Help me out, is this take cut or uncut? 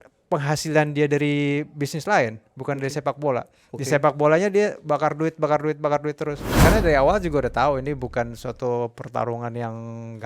cut